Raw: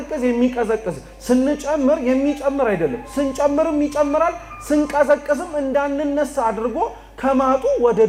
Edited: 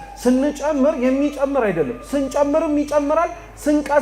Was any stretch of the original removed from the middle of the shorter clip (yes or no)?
no